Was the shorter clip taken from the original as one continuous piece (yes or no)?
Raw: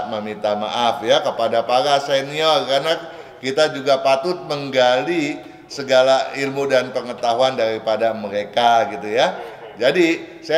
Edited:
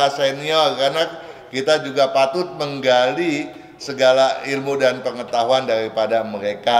yes